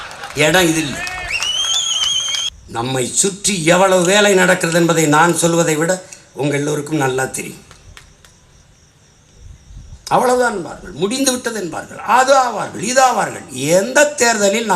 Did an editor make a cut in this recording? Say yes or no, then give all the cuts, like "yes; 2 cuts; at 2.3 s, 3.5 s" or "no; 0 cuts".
yes; 1 cut; at 2.5 s